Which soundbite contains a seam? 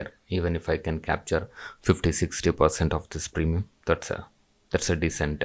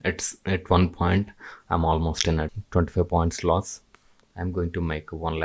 second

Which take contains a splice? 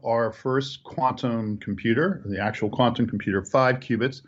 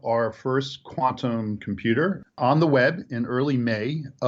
second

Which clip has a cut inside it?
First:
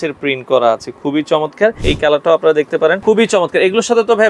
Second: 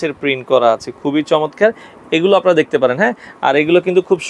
first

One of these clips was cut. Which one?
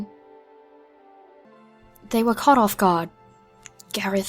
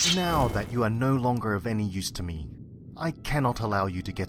first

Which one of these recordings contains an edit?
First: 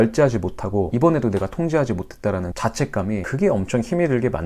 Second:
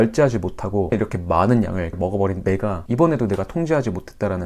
first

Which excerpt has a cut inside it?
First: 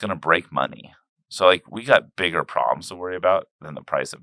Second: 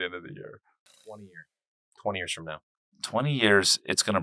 second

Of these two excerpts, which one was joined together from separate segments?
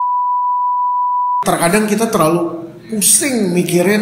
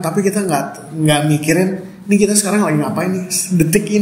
first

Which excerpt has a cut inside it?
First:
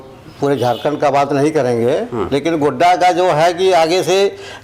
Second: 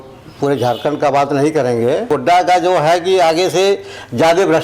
second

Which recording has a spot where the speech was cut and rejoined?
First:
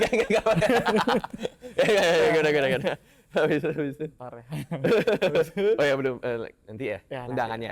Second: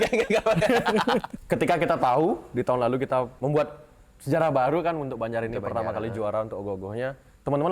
second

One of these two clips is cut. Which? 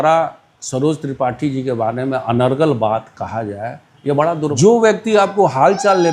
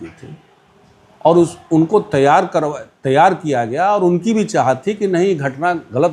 first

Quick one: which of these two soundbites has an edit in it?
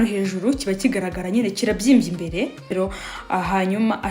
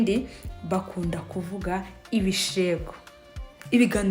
first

